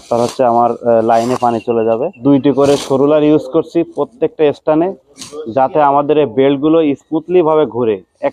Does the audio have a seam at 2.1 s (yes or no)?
yes